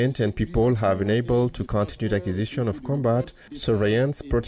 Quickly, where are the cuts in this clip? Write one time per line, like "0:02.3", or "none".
0:03.4